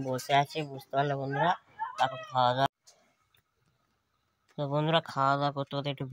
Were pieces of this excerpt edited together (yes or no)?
yes